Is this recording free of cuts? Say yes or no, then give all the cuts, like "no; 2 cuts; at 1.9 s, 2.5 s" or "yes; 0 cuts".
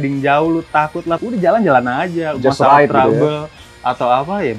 no; 1 cut; at 1.2 s